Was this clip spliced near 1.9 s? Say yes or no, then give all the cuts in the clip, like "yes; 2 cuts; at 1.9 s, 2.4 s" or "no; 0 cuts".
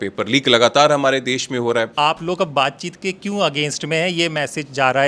yes; 1 cut; at 1.9 s